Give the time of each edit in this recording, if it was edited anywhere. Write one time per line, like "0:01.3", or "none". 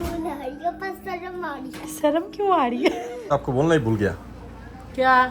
0:03.3